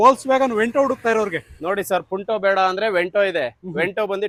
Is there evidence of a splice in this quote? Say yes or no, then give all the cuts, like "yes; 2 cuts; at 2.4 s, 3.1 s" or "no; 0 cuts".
no; 0 cuts